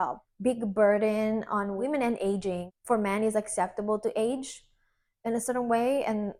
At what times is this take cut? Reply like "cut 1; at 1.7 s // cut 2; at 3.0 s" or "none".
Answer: none